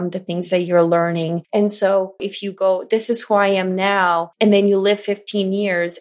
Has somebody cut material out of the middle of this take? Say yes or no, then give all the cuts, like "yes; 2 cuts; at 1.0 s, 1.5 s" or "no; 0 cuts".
yes; 3 cuts; at 1.4 s, 2.3 s, 4.3 s